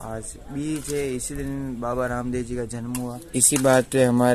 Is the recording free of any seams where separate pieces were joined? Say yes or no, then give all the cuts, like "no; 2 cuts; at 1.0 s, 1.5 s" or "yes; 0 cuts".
no; 1 cut; at 3.2 s